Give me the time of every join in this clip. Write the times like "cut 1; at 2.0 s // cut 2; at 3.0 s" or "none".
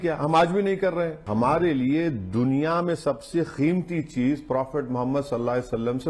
cut 1; at 1.2 s